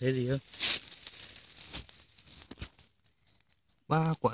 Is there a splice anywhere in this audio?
no; 0 cuts

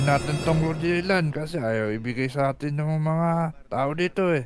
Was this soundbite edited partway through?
no; 0 cuts

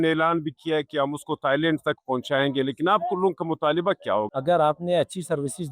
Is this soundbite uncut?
no; 1 cut; at 4.3 s

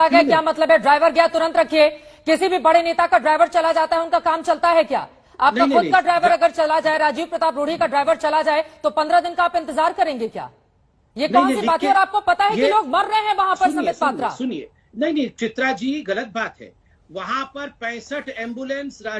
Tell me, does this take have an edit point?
no; 0 cuts

